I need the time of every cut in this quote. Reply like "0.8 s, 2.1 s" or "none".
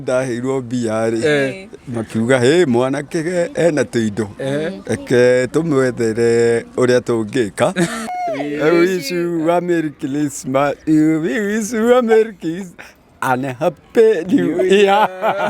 8.1 s